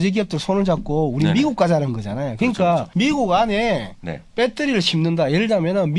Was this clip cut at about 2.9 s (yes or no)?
yes